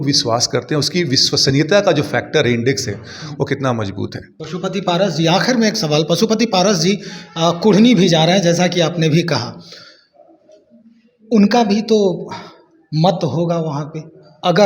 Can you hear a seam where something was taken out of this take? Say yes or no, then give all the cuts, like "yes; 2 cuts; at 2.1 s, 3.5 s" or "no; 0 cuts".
yes; 1 cut; at 4.3 s